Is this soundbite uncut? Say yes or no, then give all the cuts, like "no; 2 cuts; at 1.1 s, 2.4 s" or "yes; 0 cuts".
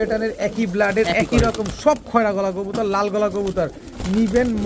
yes; 0 cuts